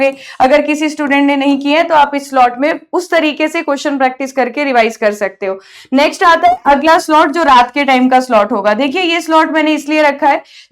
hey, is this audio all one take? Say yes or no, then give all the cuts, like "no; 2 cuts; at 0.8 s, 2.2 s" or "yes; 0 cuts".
yes; 0 cuts